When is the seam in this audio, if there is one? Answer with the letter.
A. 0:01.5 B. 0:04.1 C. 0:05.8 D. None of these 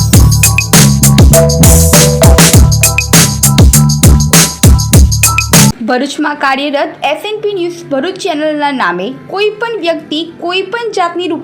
C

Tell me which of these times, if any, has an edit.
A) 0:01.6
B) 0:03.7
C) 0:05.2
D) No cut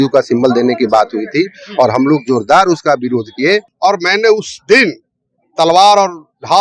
B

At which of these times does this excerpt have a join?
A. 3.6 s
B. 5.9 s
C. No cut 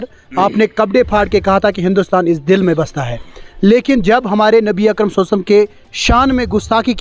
C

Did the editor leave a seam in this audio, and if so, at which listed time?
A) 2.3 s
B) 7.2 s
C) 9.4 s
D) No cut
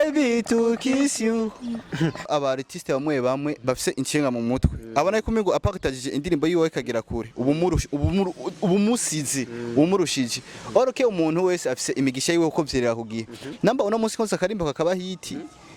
A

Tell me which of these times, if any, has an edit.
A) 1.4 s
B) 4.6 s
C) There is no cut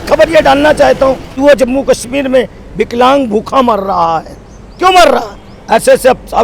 A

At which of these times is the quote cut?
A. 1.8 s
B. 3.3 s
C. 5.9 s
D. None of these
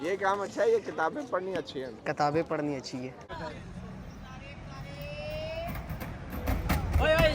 B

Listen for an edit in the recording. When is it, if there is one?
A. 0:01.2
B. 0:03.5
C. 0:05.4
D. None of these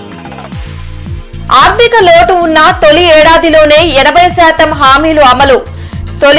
A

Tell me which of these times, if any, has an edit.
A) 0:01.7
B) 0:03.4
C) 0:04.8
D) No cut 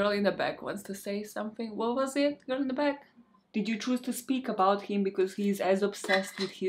B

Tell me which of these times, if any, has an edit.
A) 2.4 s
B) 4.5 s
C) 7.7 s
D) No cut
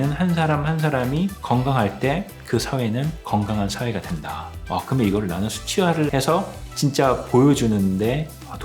B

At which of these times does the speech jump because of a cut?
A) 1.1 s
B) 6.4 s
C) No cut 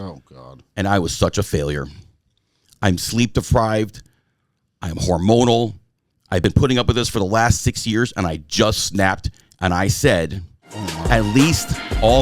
B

